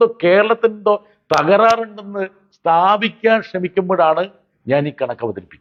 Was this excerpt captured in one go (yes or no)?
yes